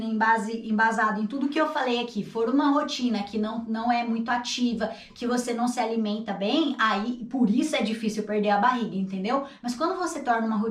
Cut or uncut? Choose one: uncut